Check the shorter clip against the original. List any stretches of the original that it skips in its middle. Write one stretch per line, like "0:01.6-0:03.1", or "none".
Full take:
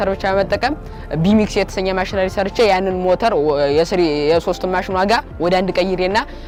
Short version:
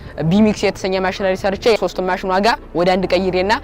0:02.7-0:04.4